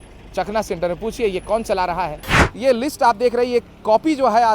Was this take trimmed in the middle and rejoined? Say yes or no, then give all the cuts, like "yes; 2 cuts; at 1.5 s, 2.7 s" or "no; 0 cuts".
yes; 1 cut; at 2.4 s